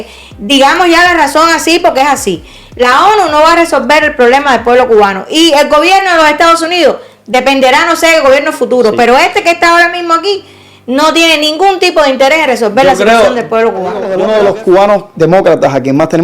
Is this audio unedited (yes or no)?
no